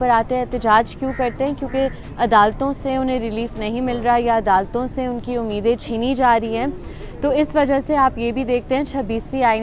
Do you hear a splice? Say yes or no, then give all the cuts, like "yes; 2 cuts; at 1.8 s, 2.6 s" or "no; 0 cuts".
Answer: no; 0 cuts